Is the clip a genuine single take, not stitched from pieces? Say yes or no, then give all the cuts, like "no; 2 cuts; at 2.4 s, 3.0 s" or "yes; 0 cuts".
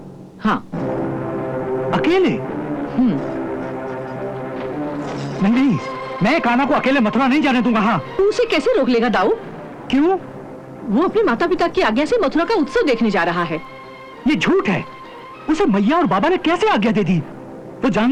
yes; 0 cuts